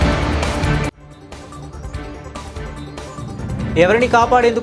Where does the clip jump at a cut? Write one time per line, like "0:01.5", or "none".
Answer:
none